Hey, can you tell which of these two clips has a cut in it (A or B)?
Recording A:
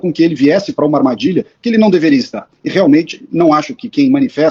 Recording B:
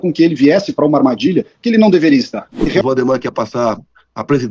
B